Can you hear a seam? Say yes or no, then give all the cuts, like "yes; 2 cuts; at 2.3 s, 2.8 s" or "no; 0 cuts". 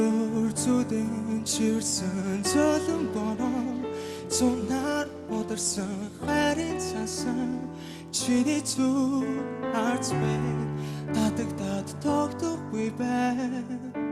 yes; 1 cut; at 1.1 s